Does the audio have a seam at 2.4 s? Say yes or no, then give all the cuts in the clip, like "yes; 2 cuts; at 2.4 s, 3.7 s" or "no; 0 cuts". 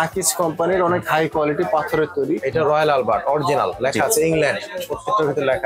yes; 1 cut; at 2.4 s